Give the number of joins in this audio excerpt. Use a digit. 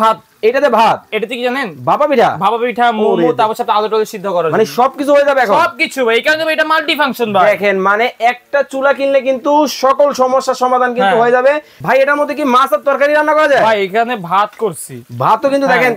1